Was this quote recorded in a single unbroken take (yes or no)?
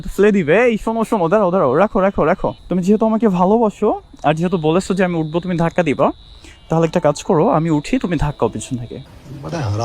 no